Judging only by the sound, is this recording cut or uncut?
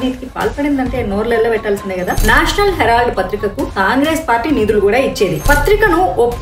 cut